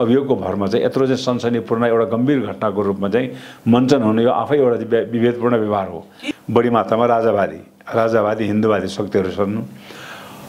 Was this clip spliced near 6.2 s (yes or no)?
yes